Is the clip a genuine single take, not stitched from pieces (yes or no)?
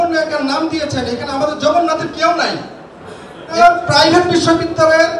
no